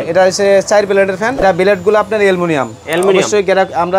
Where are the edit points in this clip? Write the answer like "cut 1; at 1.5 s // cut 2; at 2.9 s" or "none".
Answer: cut 1; at 1.4 s